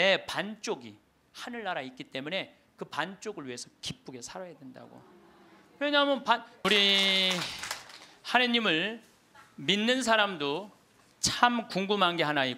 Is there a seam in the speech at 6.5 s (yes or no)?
yes